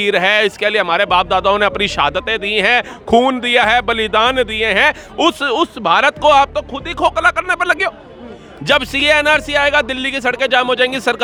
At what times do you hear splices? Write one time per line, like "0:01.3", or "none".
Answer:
none

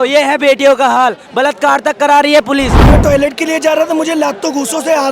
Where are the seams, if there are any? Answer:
0:02.8

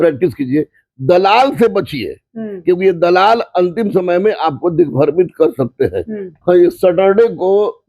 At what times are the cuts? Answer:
0:06.3

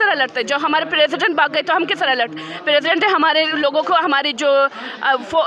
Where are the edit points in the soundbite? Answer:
none

